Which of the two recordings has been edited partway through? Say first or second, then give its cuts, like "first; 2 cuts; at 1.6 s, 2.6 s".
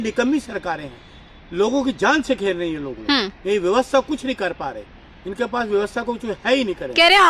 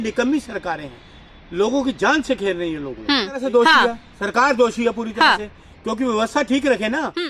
second; 1 cut; at 3.4 s